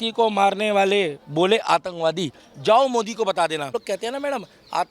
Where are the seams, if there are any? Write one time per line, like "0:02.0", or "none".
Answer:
0:03.7